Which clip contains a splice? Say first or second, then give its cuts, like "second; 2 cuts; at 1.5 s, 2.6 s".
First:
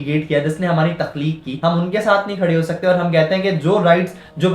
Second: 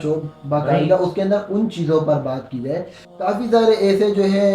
first; 1 cut; at 1.5 s